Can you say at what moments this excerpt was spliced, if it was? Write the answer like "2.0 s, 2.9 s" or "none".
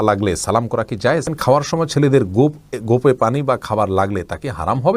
1.3 s